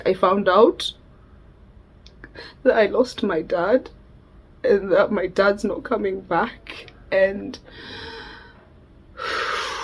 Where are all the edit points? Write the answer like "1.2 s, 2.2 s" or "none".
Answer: none